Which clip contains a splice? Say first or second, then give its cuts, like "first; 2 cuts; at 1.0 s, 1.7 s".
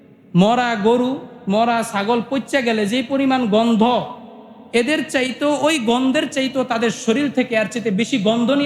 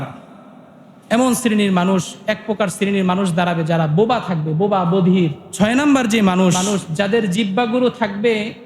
second; 2 cuts; at 5.4 s, 6.6 s